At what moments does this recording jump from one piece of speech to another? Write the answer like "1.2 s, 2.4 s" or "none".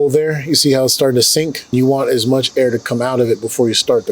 1.7 s